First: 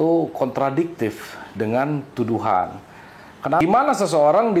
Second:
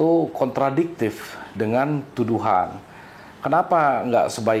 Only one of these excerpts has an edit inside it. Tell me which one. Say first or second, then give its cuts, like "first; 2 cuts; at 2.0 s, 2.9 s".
first; 1 cut; at 3.6 s